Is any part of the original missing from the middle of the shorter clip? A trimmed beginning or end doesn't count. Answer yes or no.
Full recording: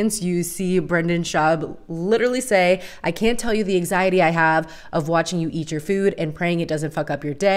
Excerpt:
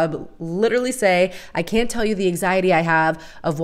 no